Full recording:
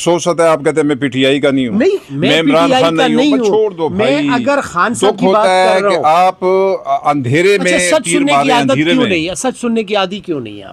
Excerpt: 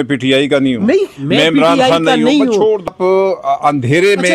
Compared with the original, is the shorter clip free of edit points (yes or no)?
no